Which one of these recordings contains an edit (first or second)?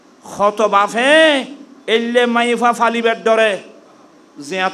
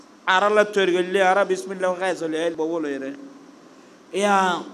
second